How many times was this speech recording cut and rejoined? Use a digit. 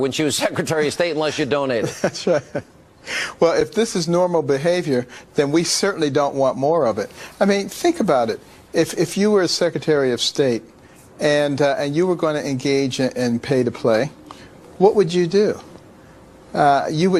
0